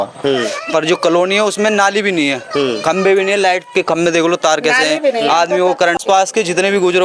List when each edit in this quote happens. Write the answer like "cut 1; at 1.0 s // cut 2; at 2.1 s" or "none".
cut 1; at 6.0 s